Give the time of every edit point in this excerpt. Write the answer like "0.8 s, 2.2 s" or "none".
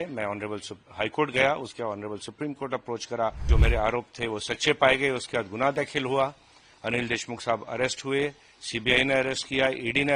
3.5 s